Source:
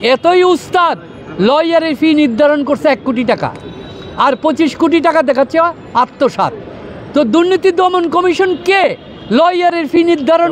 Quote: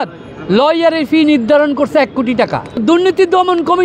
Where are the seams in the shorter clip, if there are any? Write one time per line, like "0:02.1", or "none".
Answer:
0:02.8